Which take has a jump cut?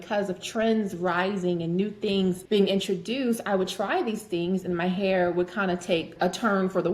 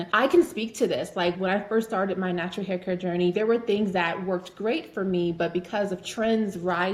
first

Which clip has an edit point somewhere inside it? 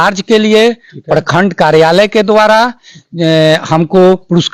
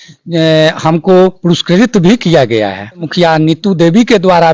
second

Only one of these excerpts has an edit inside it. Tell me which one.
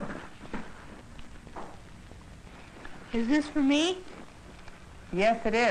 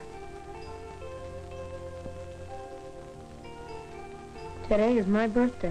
first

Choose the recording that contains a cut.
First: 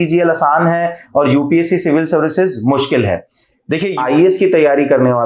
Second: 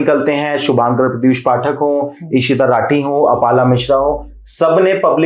first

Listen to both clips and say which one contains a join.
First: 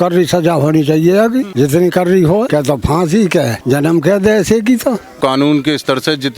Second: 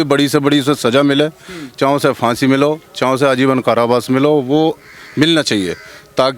first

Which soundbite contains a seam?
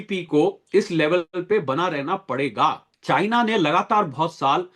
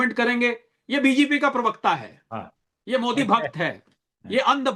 first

